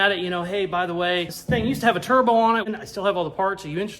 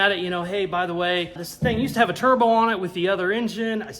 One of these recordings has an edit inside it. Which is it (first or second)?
first